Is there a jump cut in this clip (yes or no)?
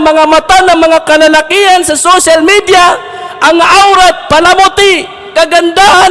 no